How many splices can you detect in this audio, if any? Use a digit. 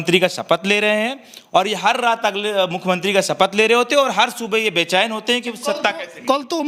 0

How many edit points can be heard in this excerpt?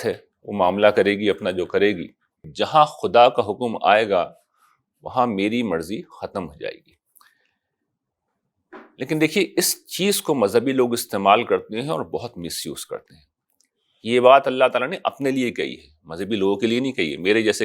1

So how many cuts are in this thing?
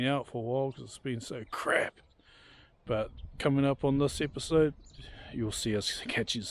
1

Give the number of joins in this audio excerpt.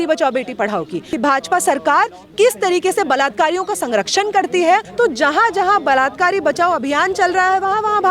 2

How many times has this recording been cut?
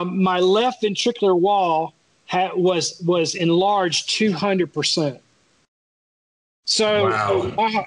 0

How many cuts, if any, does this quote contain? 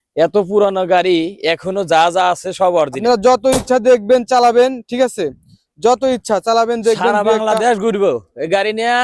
1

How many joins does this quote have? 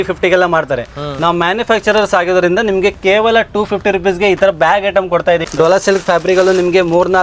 1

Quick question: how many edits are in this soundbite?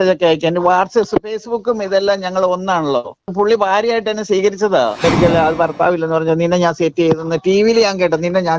2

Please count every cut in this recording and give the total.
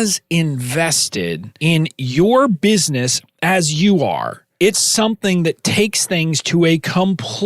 2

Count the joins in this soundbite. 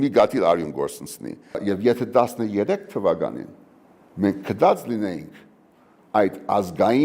1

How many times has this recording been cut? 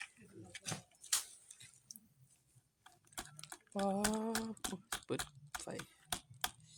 0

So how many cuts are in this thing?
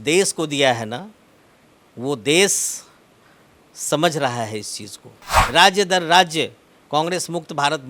1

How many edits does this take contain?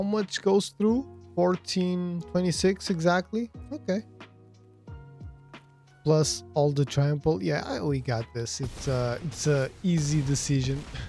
3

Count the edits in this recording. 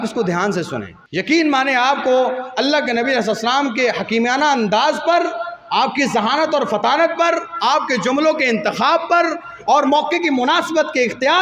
1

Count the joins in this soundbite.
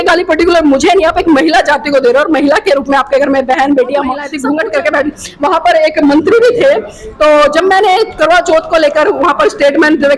1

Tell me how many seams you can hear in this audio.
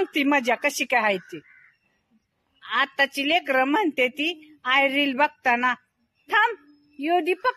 0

